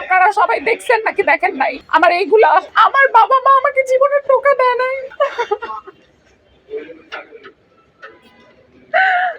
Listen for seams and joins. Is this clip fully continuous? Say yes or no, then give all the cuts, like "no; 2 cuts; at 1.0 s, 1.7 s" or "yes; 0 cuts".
no; 1 cut; at 1.8 s